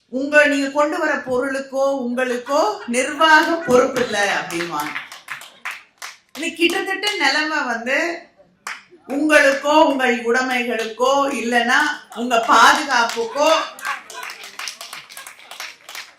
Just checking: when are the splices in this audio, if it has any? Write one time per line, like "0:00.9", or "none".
none